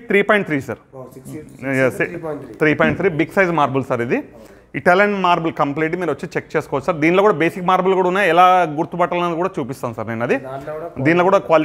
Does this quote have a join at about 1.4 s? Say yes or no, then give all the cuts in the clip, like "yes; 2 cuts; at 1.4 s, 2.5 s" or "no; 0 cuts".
no; 0 cuts